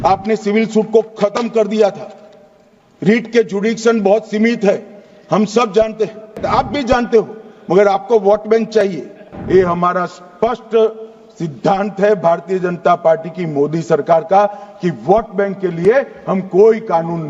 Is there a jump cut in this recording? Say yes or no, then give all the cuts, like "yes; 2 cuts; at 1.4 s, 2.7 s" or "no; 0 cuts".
yes; 2 cuts; at 6.4 s, 9.3 s